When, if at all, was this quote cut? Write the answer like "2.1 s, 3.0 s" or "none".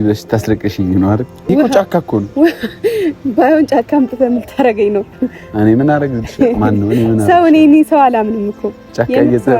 1.5 s